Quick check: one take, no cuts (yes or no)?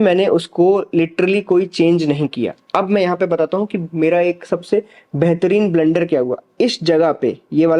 yes